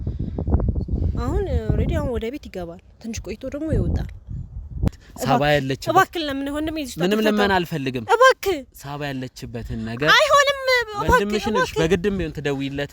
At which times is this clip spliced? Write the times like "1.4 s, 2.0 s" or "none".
4.9 s